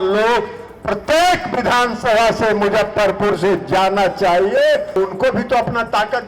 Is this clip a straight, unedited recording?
no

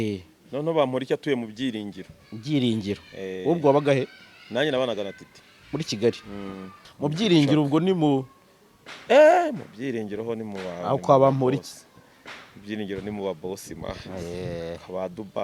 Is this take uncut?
no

